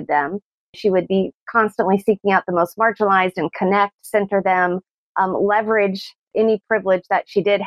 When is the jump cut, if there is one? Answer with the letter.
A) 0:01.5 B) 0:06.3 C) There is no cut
B